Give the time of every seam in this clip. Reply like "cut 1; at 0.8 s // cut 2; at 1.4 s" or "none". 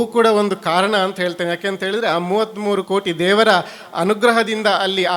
none